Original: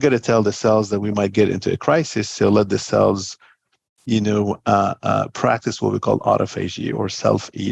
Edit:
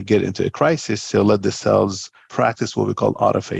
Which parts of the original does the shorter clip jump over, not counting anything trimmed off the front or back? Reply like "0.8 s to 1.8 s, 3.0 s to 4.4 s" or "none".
3.5 s to 5.3 s